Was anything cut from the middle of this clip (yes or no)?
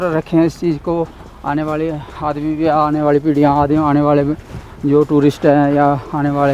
no